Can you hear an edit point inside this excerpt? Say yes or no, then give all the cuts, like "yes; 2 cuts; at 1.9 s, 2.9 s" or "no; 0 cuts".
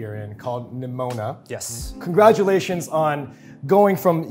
no; 0 cuts